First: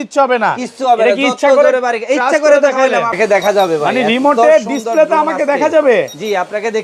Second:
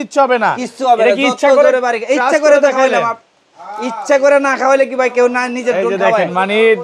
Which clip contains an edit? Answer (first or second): first